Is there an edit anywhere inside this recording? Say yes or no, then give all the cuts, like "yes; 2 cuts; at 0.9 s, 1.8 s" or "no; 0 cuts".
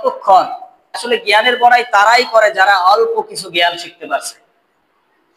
yes; 1 cut; at 1.0 s